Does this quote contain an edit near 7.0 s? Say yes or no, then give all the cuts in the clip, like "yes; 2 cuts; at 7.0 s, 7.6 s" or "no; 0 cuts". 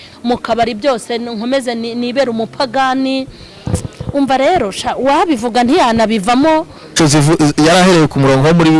yes; 1 cut; at 7.0 s